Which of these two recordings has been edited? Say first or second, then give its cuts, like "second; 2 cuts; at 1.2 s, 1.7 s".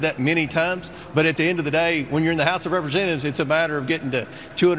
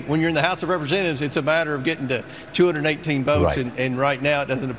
first; 1 cut; at 0.9 s